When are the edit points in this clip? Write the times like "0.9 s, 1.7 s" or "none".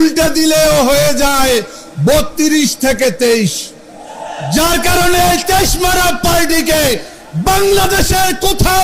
none